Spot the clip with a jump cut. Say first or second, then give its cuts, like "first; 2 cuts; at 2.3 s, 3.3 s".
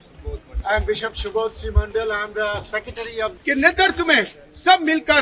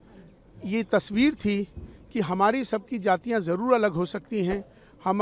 first; 1 cut; at 3.3 s